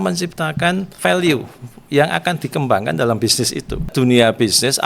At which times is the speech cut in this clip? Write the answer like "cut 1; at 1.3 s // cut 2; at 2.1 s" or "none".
cut 1; at 0.9 s // cut 2; at 3.9 s